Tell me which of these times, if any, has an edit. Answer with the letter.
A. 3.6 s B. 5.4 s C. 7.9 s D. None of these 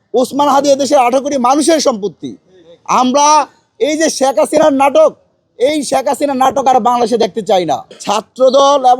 C